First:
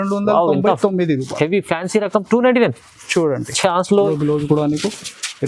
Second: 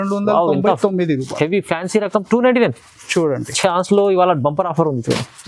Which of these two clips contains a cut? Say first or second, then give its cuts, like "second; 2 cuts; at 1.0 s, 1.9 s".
first; 1 cut; at 4.1 s